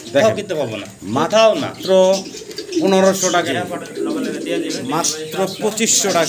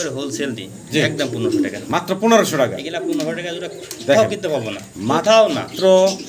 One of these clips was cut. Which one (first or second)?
first